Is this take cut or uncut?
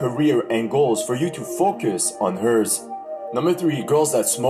cut